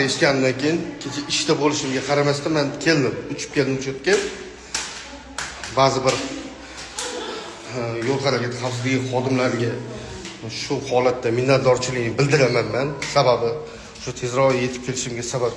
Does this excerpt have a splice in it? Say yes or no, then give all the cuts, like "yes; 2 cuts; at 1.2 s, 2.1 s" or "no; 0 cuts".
yes; 1 cut; at 4.3 s